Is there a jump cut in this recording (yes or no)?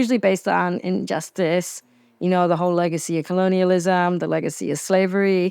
no